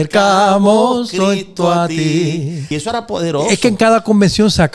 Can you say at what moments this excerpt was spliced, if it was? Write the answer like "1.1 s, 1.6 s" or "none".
2.7 s